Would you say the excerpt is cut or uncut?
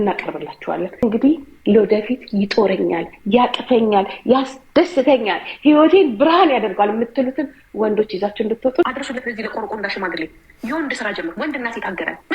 cut